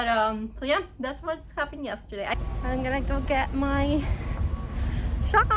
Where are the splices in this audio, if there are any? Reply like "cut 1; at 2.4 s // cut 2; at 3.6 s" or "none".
cut 1; at 2.3 s

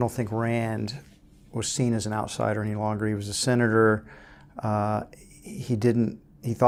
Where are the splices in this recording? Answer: none

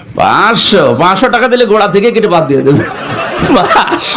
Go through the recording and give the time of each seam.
none

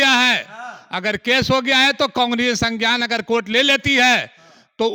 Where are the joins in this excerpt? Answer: none

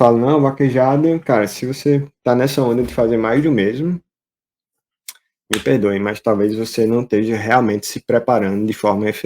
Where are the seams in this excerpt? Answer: none

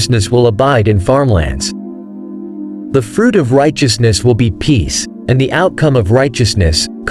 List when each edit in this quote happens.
none

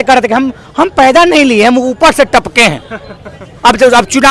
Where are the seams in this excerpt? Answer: none

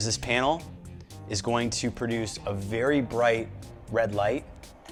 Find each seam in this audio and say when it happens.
none

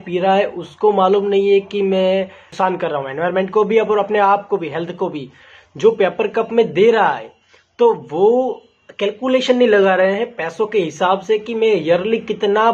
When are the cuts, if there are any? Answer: none

